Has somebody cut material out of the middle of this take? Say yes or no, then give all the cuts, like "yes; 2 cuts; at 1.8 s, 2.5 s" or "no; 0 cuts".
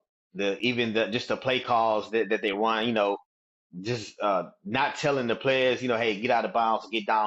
no; 0 cuts